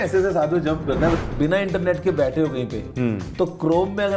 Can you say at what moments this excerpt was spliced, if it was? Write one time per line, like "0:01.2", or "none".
0:01.2